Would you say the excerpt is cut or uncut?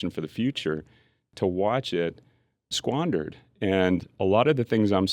cut